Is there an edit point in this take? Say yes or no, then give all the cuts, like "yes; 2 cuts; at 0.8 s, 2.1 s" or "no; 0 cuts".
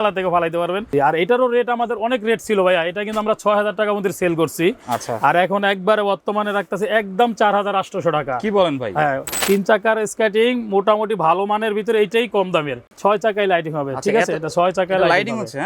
yes; 3 cuts; at 0.9 s, 9.4 s, 12.9 s